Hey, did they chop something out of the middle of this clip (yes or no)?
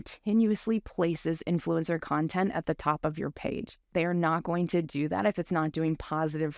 yes